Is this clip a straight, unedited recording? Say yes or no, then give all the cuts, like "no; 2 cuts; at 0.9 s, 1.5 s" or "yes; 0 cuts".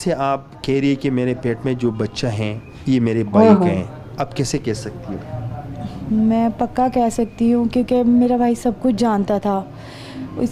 yes; 0 cuts